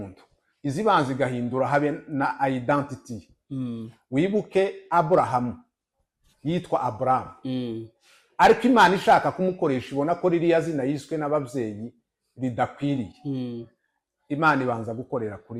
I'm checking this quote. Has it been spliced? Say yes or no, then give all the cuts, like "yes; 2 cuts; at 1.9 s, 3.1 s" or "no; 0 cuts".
no; 0 cuts